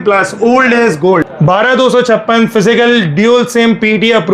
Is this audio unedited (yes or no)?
no